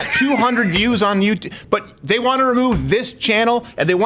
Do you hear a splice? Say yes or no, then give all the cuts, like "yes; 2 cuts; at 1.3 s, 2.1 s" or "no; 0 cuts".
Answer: no; 0 cuts